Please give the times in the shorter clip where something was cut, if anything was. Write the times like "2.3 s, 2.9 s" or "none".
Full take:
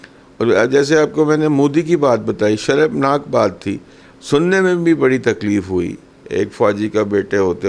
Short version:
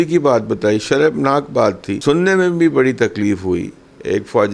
1.9 s